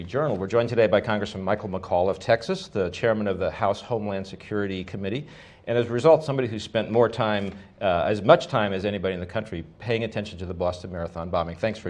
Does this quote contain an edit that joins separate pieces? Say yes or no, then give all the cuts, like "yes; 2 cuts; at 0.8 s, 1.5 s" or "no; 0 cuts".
yes; 1 cut; at 8.8 s